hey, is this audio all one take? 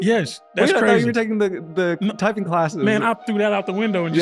yes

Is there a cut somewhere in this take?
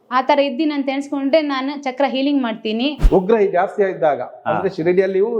yes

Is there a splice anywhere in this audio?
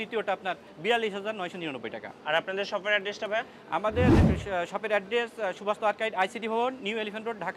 no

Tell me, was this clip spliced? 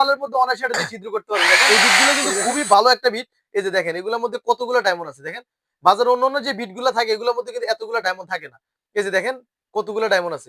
yes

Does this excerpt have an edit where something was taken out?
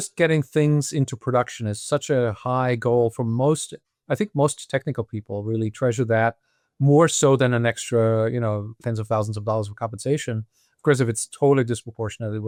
no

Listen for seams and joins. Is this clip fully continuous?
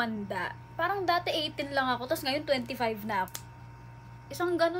no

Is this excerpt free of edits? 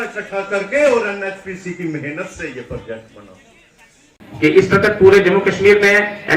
no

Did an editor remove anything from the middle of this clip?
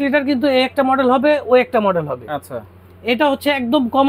no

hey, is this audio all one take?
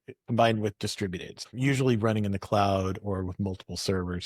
no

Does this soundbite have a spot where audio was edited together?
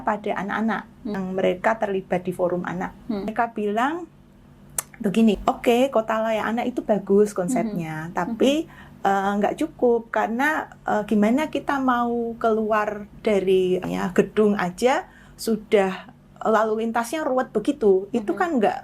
yes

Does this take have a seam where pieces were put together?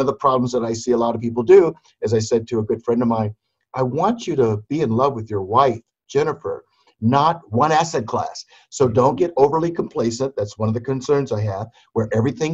no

